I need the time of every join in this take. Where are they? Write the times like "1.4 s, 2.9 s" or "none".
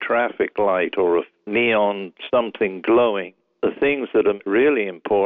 1.4 s, 3.4 s, 4.4 s